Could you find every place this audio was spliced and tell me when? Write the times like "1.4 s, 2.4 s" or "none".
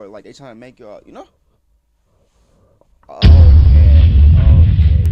none